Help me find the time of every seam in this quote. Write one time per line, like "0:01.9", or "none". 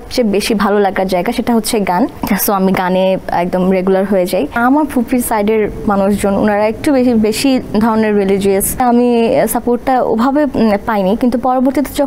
0:02.2
0:04.6
0:08.8